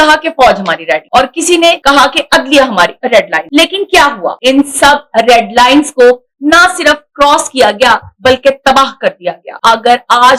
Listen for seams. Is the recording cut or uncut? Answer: cut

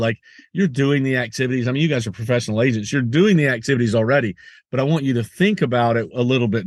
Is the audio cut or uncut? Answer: uncut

